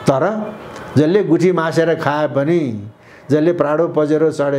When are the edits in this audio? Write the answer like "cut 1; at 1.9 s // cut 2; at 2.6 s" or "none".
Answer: none